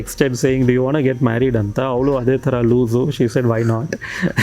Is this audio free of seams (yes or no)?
yes